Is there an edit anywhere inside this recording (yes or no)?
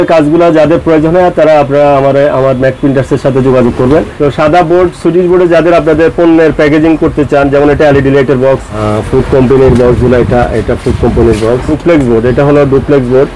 yes